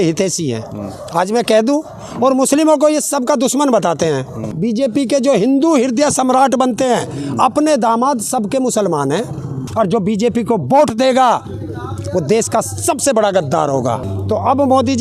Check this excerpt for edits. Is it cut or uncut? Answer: cut